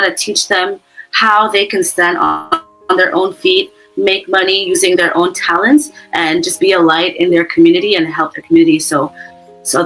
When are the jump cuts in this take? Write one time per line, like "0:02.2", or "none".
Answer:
none